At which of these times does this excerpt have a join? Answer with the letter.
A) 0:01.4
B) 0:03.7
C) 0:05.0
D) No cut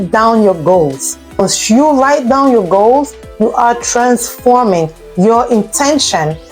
A